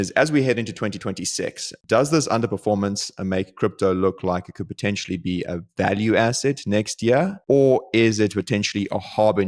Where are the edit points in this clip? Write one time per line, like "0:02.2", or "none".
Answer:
none